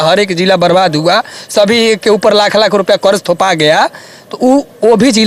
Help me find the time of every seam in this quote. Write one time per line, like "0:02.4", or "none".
none

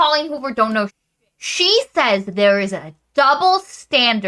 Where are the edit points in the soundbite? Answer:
0:01.0

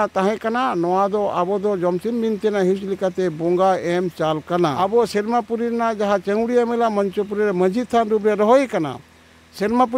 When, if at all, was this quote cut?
0:04.8

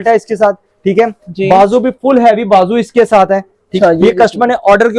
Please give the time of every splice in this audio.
0:03.7

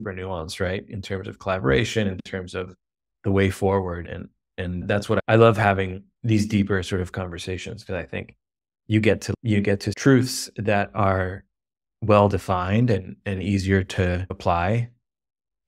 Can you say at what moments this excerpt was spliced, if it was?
0:09.9
0:14.4

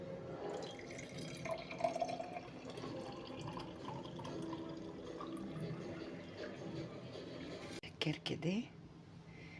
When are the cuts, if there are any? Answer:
0:07.8

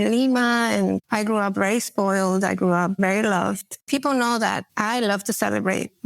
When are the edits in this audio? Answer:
0:01.0
0:03.8
0:04.7

